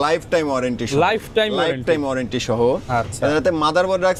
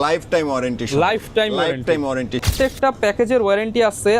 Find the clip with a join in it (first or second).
second